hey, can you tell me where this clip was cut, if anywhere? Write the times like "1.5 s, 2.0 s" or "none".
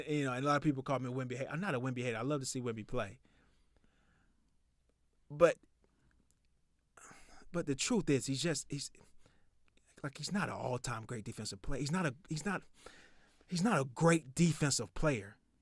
none